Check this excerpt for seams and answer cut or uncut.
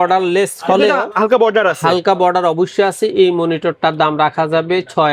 uncut